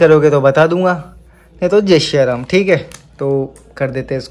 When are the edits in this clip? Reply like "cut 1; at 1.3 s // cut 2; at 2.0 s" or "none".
none